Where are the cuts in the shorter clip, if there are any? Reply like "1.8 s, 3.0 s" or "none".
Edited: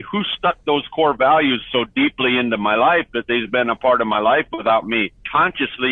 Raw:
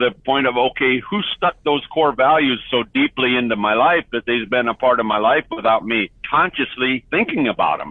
none